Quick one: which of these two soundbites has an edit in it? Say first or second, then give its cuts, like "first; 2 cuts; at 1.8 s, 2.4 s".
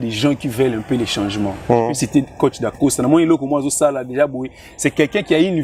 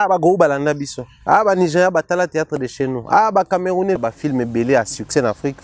second; 1 cut; at 4.0 s